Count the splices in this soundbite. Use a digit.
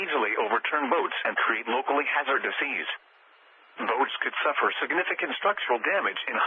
1